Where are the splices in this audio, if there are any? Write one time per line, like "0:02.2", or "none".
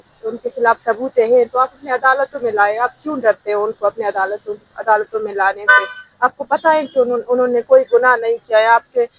none